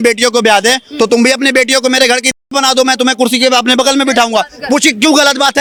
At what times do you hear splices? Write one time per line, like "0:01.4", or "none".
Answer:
none